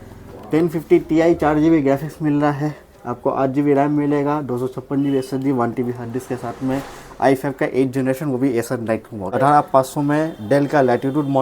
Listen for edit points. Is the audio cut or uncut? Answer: cut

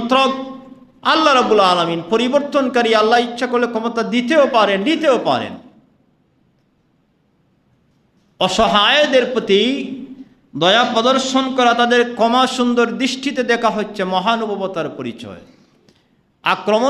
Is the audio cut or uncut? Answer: uncut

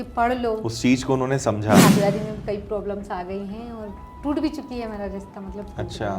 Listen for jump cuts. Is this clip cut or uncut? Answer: cut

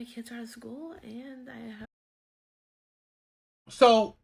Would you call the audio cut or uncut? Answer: uncut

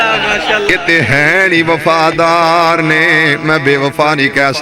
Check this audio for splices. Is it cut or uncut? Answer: uncut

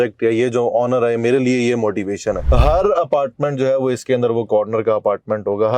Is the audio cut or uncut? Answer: cut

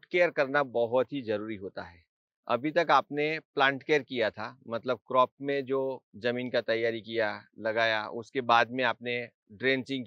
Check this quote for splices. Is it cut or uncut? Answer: uncut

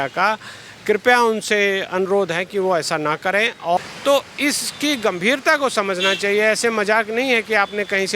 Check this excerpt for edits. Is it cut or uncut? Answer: cut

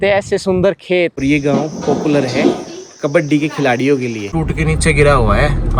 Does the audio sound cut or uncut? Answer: cut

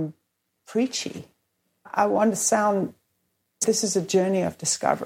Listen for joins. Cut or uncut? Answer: cut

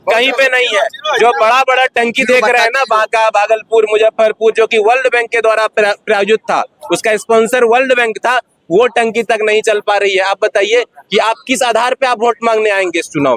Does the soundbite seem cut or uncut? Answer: uncut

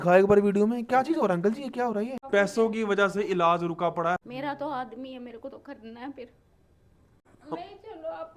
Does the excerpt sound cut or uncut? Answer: cut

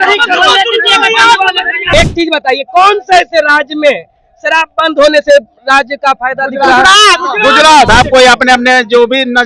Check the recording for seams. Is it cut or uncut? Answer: cut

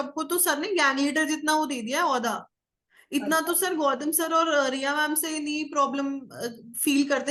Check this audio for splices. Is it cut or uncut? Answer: uncut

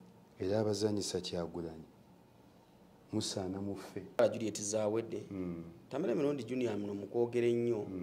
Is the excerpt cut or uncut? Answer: cut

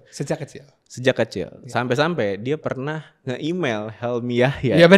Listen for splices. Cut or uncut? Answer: uncut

